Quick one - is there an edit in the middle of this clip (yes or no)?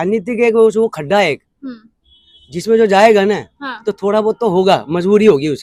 no